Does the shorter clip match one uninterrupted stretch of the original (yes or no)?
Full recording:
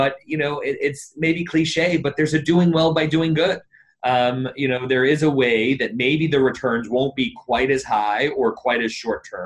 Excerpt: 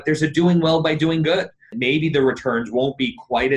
no